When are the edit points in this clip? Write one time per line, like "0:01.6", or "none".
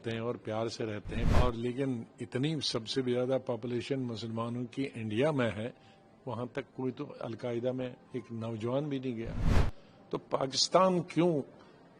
0:01.3